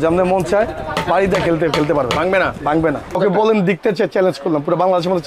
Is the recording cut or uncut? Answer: cut